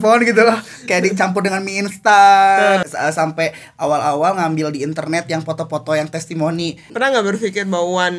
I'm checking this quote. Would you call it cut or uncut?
cut